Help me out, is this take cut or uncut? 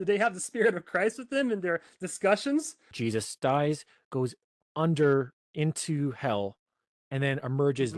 cut